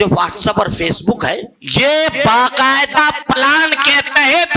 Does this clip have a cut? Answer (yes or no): yes